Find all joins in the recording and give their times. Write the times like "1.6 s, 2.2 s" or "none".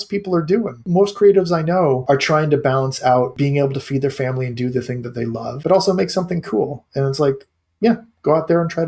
0.9 s, 2.0 s, 3.3 s, 5.5 s